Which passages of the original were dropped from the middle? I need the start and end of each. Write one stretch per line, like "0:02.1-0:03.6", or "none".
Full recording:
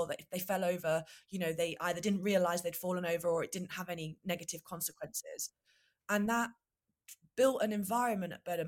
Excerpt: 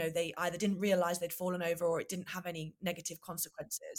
none